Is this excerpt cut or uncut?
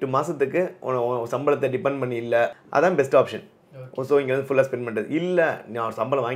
cut